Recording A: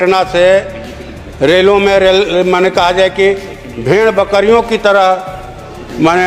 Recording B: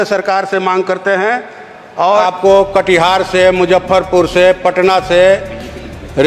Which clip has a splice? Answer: B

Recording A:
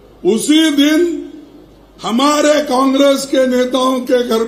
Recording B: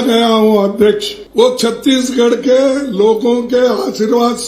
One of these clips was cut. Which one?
B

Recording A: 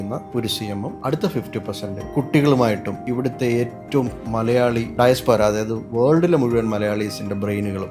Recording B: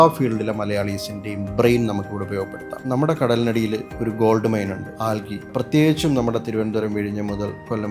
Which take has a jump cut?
B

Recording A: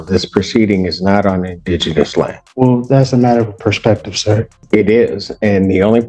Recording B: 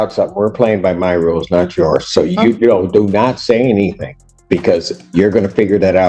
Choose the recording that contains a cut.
A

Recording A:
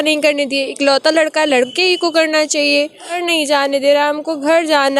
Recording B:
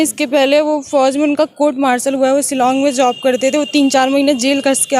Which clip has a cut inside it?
A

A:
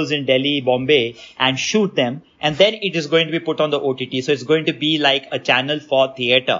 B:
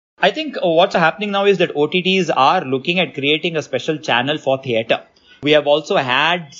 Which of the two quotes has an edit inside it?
B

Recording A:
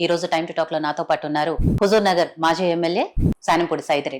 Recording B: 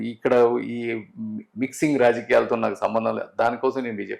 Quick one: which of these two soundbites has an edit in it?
A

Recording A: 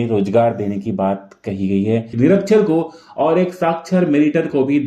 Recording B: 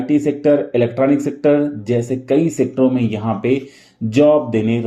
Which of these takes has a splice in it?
A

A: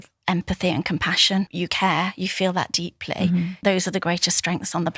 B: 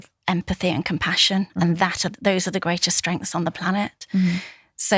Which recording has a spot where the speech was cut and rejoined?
A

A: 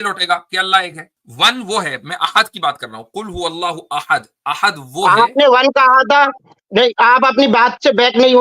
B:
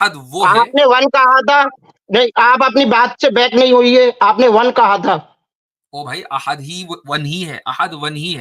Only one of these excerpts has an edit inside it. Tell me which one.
A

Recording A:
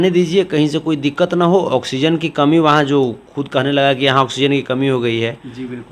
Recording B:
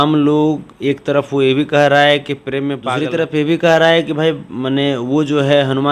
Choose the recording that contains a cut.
B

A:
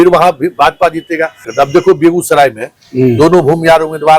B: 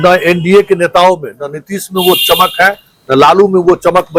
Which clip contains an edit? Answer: A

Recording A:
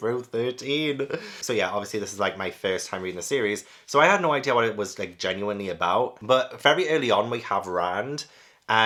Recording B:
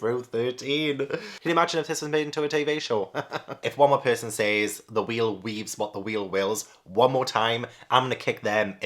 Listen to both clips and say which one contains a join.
B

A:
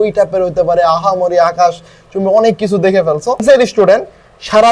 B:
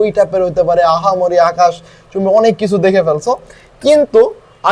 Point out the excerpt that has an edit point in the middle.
A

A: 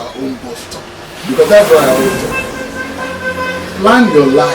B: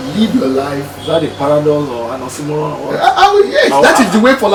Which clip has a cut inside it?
A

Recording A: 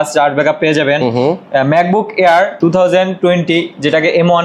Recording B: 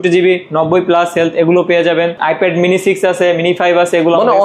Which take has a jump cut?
B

